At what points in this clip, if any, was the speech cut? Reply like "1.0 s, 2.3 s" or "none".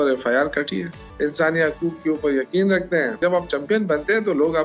1.0 s, 3.2 s